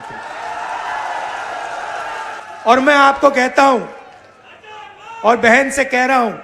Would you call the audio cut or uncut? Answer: cut